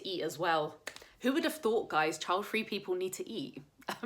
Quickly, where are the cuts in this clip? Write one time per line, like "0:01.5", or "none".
none